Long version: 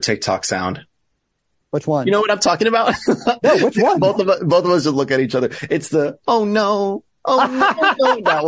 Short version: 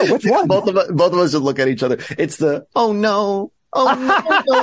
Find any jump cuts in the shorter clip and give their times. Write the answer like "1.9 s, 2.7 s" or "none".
none